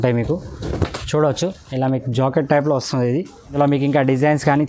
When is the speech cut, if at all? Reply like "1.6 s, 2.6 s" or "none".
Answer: 3.4 s